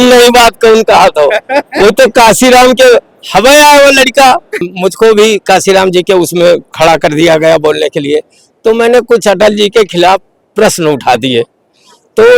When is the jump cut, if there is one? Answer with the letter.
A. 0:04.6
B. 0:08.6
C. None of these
A